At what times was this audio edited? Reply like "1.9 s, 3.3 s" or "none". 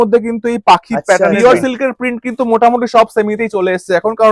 1.2 s